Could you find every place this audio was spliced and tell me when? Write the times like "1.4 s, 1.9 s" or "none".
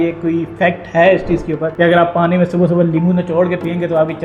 1.7 s